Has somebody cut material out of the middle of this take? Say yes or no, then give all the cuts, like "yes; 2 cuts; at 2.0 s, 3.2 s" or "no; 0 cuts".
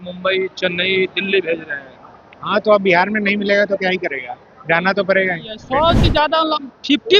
yes; 1 cut; at 5.5 s